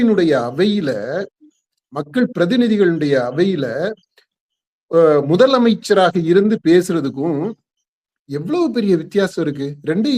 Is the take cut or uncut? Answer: uncut